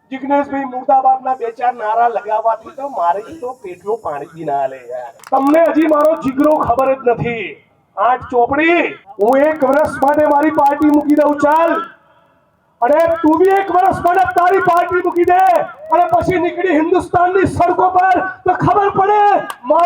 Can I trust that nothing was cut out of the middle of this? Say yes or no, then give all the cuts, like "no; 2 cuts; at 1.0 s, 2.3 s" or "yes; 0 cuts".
no; 2 cuts; at 5.1 s, 9.0 s